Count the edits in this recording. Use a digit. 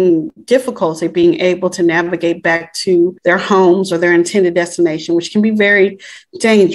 1